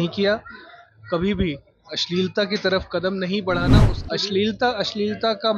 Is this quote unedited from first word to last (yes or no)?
no